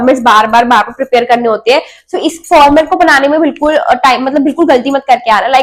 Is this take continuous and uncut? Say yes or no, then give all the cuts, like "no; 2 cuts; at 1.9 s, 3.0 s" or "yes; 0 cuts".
yes; 0 cuts